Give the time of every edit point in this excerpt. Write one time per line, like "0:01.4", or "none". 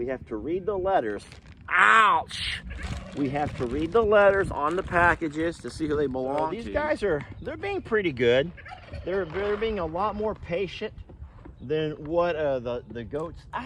0:06.6